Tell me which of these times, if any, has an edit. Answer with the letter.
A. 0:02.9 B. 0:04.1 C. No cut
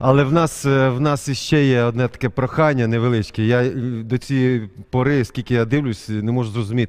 C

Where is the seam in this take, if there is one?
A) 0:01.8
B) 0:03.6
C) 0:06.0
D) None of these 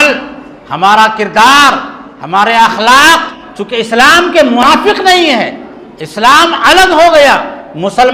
D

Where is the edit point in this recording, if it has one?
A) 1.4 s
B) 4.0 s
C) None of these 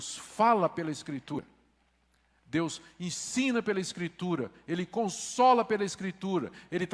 A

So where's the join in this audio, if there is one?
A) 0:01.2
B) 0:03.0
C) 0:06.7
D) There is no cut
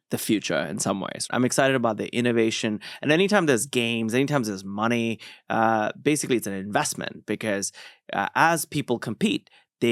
A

